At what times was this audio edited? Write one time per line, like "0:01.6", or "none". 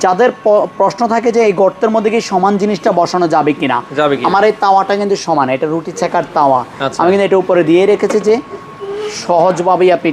none